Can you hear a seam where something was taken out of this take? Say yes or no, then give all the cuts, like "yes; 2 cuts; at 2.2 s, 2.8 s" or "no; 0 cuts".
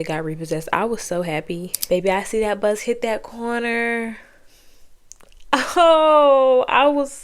yes; 1 cut; at 1.7 s